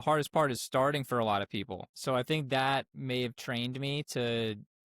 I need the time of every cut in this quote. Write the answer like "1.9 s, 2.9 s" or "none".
1.8 s